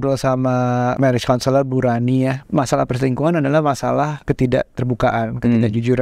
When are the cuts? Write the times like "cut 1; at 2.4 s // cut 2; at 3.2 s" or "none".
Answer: cut 1; at 1.0 s // cut 2; at 2.4 s // cut 3; at 4.2 s